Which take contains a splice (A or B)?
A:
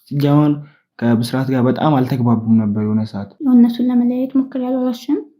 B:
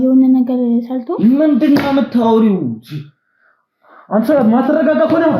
A